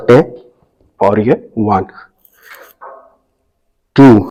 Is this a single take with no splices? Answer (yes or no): yes